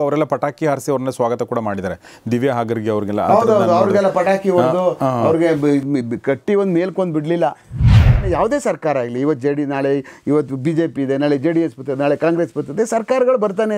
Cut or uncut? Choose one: cut